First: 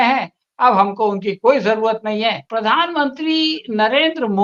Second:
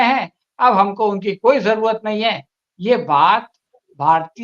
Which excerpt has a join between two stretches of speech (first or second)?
first